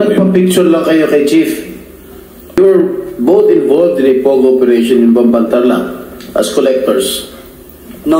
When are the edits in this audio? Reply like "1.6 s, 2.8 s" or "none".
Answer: 2.6 s